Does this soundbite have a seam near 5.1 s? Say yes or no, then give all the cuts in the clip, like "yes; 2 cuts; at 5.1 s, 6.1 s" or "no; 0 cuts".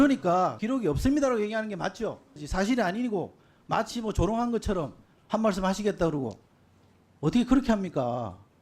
no; 1 cut; at 2.5 s